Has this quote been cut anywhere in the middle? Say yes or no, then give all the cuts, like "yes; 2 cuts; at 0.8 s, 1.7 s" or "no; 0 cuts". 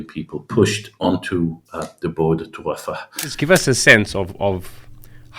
yes; 1 cut; at 3.3 s